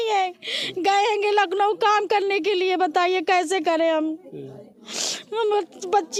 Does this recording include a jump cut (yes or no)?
no